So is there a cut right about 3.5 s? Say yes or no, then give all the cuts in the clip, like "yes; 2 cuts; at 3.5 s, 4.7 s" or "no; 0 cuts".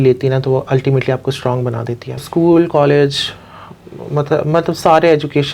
no; 1 cut; at 2.2 s